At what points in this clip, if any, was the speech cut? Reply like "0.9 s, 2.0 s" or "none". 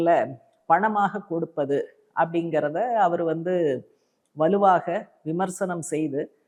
none